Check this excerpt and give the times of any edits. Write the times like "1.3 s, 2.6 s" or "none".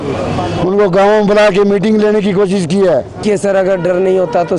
3.2 s